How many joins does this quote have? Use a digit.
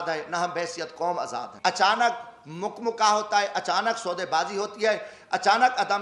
1